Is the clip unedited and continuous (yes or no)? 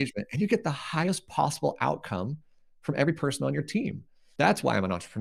yes